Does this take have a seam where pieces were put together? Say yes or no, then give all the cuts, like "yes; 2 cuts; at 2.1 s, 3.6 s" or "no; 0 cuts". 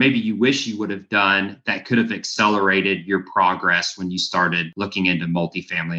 yes; 1 cut; at 4.7 s